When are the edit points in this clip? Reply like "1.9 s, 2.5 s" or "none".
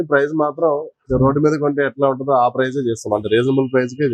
none